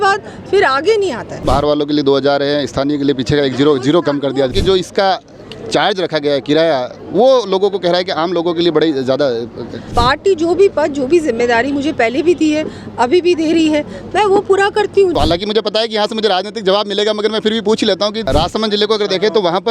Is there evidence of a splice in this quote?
yes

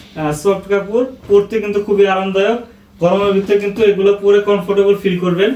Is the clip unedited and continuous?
yes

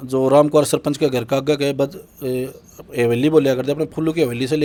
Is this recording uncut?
yes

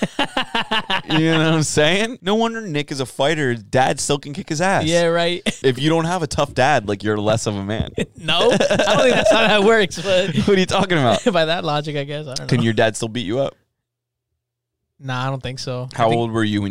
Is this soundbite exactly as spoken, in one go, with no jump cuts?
no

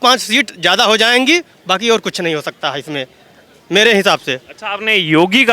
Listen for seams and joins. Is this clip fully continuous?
yes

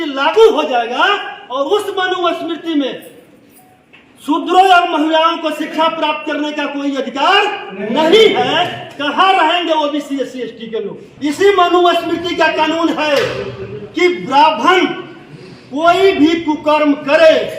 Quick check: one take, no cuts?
no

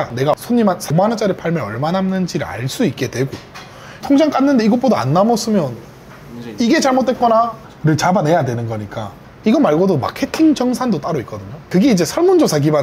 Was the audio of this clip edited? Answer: no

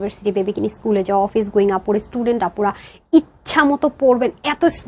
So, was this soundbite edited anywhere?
no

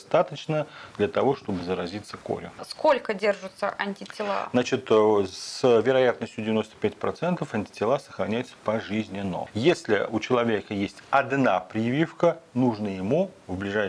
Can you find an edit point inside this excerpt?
yes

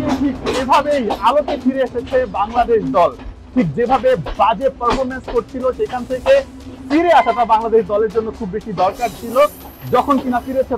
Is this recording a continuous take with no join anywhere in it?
yes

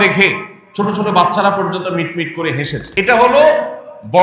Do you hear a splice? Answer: yes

